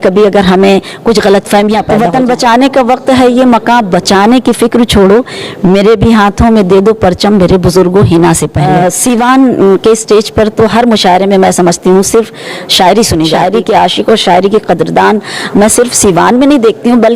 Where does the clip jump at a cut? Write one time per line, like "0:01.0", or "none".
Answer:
0:01.9
0:08.6
0:13.3